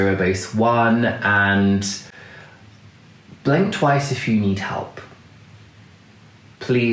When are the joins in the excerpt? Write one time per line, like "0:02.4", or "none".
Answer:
none